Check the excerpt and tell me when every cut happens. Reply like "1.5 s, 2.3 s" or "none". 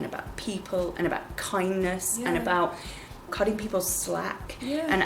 3.3 s